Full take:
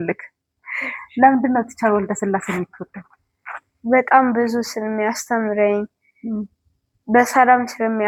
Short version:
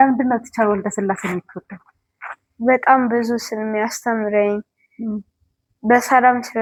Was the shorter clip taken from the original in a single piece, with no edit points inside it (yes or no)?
yes